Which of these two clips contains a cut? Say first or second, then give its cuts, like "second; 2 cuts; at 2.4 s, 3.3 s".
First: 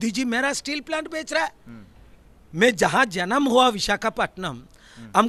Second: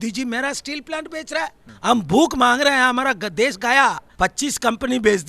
second; 2 cuts; at 1.6 s, 4.1 s